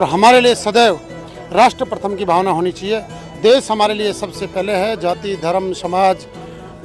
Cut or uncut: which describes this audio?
uncut